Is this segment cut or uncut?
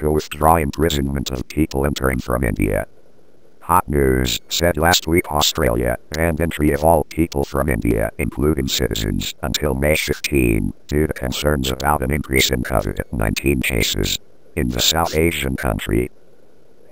uncut